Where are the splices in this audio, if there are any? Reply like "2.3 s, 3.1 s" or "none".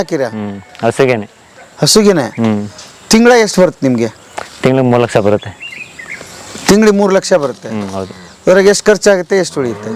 none